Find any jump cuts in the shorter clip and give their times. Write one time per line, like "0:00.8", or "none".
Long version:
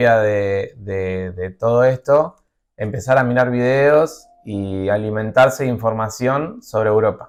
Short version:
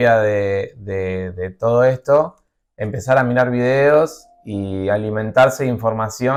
none